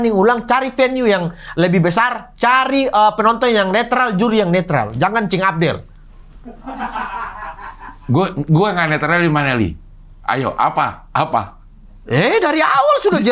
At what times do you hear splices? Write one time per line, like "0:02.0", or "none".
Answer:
none